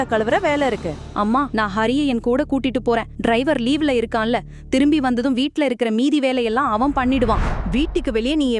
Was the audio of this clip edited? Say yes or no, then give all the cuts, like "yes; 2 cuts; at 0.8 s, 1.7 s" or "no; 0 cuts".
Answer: yes; 1 cut; at 7.5 s